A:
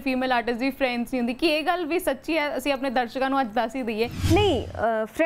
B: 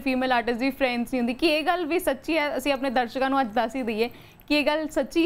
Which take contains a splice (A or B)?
A